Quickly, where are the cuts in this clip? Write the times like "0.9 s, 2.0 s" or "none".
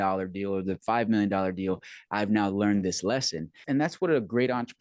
3.6 s